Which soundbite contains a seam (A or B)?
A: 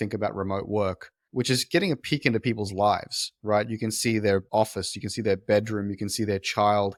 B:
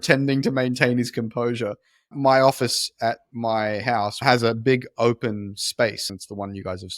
B